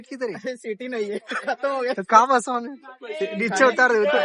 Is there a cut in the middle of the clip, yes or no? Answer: no